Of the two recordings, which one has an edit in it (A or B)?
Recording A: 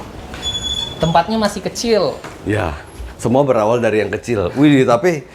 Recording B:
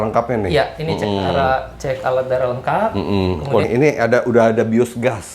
B